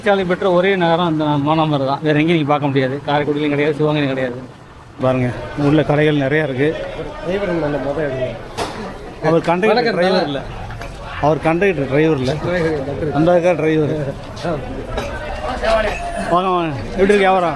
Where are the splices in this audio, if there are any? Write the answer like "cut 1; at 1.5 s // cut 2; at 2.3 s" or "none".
cut 1; at 5.0 s // cut 2; at 15.3 s